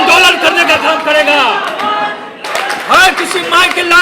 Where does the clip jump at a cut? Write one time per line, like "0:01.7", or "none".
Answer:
0:02.4